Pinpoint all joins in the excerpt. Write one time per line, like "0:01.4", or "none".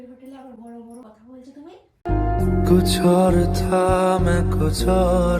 0:01.0